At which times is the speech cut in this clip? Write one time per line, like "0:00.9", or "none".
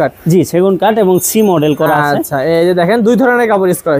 none